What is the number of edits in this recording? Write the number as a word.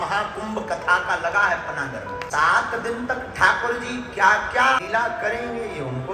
two